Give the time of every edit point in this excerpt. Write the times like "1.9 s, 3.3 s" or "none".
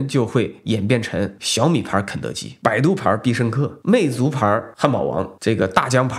none